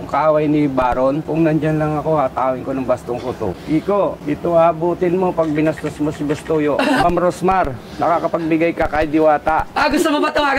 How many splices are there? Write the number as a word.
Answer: four